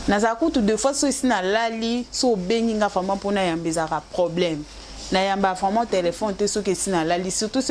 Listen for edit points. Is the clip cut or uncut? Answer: uncut